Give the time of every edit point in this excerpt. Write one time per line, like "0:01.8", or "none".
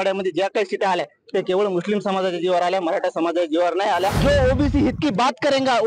0:04.2